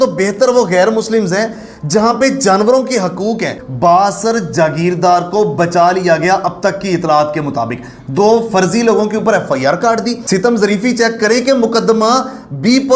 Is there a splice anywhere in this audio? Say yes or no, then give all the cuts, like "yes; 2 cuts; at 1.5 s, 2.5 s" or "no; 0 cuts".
yes; 2 cuts; at 3.6 s, 10.2 s